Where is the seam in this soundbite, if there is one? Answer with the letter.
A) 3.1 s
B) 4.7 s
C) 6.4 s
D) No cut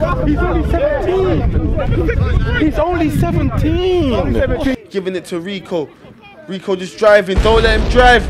B